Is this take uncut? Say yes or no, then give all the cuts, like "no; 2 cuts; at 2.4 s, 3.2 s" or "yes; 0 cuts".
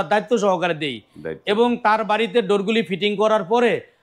yes; 0 cuts